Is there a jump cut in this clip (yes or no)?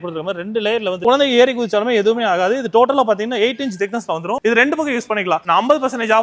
yes